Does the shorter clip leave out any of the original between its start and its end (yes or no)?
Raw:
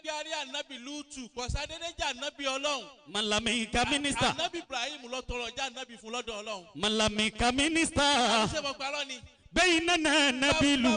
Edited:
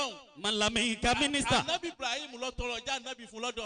no